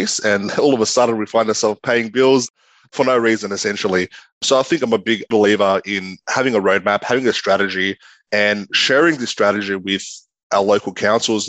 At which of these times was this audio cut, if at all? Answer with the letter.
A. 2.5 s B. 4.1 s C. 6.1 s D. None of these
A